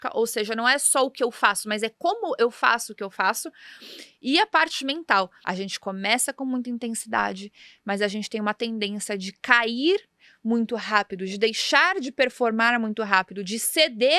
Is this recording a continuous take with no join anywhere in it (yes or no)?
no